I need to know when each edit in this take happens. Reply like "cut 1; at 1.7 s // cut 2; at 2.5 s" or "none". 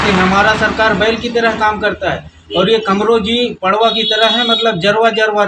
none